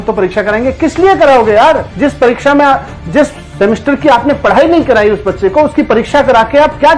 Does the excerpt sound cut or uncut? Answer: uncut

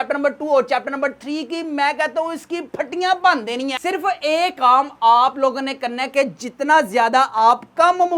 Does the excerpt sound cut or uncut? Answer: cut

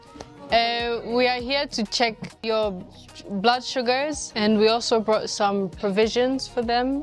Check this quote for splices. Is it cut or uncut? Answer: cut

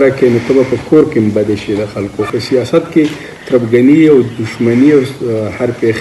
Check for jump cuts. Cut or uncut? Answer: cut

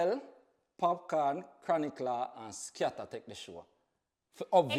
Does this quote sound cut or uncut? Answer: uncut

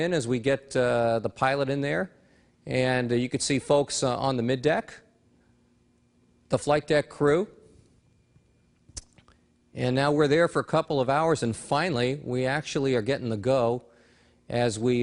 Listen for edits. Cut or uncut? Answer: cut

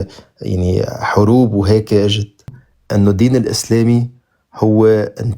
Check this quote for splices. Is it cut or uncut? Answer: cut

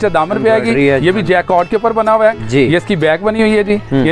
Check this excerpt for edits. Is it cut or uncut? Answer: uncut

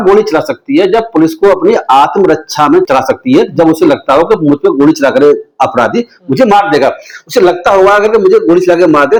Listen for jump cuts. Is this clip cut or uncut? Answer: uncut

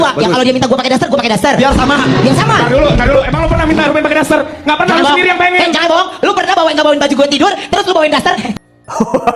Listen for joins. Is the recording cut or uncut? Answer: uncut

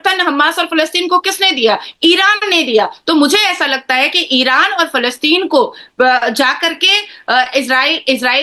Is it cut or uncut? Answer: uncut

